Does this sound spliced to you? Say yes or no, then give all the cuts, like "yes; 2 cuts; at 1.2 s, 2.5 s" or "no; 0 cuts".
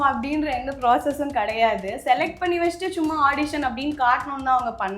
no; 0 cuts